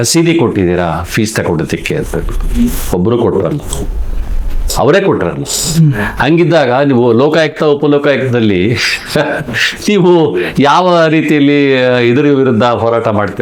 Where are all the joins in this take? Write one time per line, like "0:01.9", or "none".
none